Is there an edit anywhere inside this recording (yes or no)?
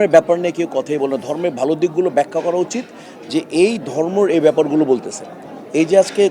no